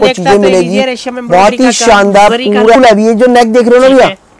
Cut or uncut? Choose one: cut